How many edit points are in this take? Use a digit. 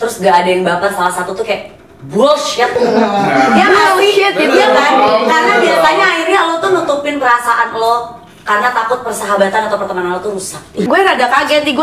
1